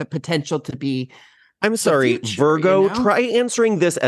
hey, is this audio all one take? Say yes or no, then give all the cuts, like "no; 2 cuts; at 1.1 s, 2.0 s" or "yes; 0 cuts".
yes; 0 cuts